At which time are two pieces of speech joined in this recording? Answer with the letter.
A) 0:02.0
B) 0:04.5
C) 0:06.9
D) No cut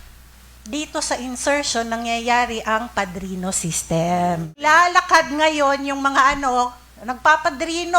B